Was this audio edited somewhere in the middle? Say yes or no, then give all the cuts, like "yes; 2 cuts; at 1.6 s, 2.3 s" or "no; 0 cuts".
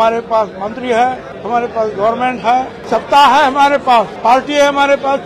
yes; 3 cuts; at 1.3 s, 2.8 s, 4.1 s